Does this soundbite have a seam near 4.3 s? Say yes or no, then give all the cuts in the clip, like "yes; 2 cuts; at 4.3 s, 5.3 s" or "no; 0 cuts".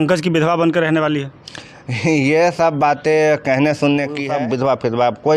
yes; 1 cut; at 4.3 s